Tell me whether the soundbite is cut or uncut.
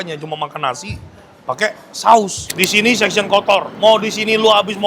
cut